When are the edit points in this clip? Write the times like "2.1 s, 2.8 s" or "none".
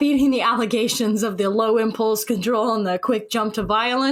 none